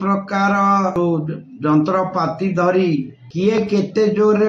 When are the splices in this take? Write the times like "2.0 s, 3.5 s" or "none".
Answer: 1.0 s, 3.2 s